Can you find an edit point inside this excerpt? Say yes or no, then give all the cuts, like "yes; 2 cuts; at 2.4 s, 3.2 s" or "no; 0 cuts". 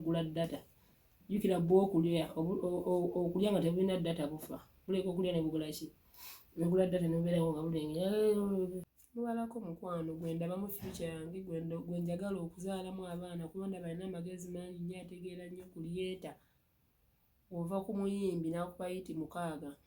yes; 1 cut; at 8.9 s